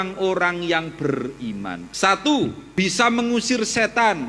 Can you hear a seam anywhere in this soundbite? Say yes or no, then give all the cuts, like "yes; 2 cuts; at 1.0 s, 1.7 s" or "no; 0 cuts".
yes; 2 cuts; at 1.8 s, 2.6 s